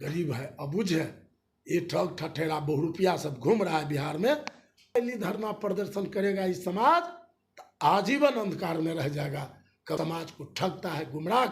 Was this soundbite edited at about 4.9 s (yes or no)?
yes